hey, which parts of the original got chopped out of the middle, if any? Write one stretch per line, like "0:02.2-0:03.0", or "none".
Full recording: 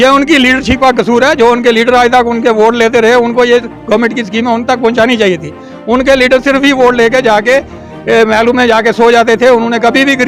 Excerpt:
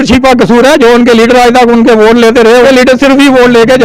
0:03.2-0:06.1